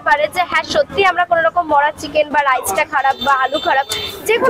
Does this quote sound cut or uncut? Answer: uncut